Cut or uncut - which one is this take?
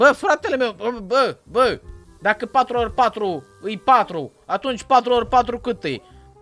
uncut